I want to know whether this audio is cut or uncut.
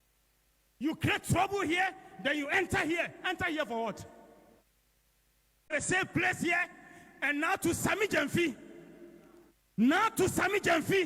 cut